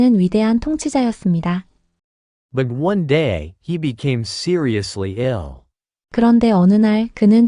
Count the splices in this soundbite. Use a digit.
1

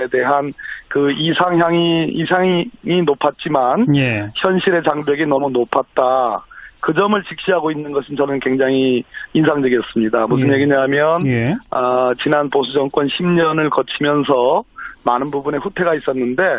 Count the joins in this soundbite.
1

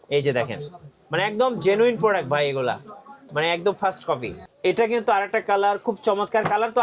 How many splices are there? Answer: 1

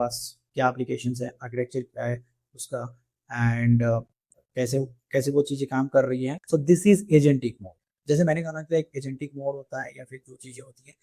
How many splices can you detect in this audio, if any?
1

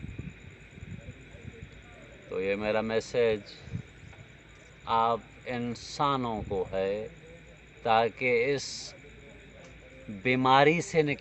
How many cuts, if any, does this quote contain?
0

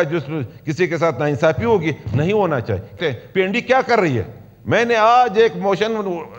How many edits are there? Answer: 1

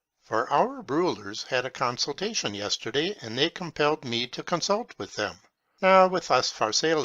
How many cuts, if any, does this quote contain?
1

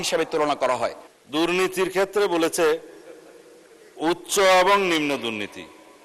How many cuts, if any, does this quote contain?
1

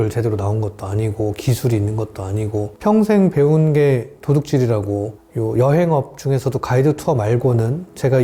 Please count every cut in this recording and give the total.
0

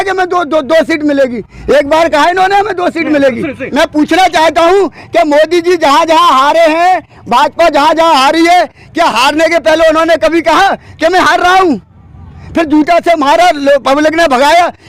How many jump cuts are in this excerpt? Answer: 1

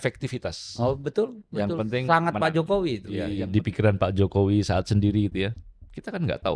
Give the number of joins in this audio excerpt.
1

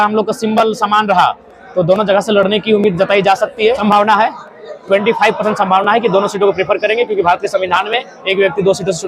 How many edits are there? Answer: 1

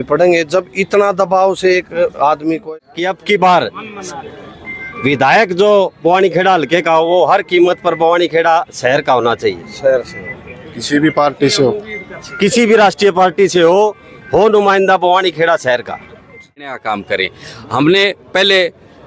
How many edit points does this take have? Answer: 2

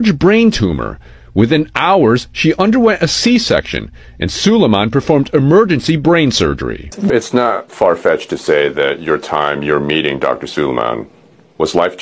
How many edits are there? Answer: 1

